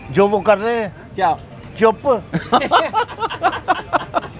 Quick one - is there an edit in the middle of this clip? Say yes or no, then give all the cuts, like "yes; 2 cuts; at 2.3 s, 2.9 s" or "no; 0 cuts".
no; 0 cuts